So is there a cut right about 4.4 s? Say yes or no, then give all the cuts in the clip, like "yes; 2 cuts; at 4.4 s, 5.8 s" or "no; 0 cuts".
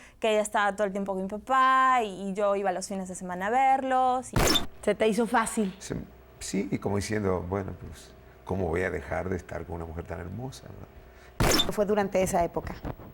yes; 2 cuts; at 4.4 s, 11.7 s